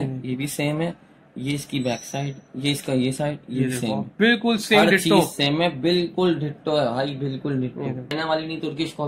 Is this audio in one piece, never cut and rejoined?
no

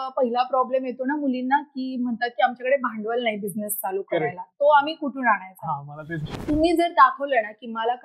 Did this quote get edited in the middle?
yes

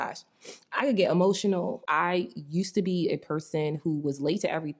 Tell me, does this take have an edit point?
yes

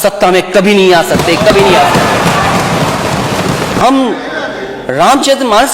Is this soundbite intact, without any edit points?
no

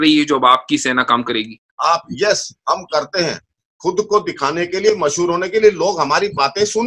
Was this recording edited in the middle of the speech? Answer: yes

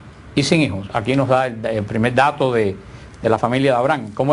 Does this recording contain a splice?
no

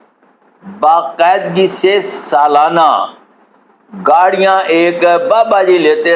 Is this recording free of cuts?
yes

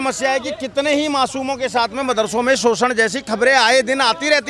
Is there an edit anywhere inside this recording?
no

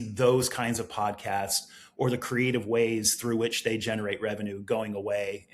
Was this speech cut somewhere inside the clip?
no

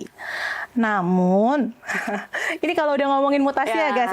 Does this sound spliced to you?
no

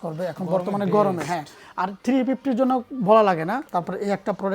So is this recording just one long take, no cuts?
yes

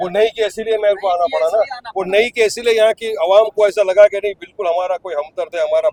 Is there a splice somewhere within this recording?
no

